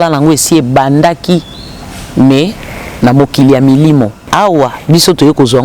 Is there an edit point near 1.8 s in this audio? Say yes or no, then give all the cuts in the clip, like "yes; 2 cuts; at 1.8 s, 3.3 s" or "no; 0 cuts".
no; 1 cut; at 4.2 s